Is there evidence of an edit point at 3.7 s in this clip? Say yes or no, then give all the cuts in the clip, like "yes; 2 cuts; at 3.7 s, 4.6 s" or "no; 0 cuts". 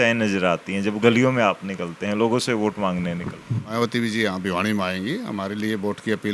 yes; 1 cut; at 3.7 s